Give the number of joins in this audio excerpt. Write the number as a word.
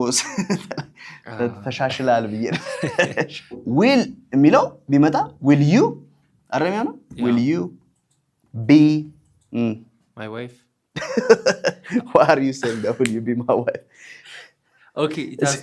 one